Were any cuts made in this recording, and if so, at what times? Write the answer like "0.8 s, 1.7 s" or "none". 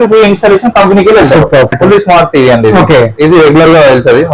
1.7 s